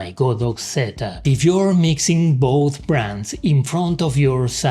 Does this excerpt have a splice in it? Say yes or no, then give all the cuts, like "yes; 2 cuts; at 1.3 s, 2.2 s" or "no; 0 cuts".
yes; 1 cut; at 1.2 s